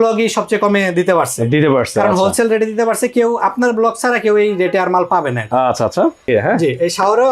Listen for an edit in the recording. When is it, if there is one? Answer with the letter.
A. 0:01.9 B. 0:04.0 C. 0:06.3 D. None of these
C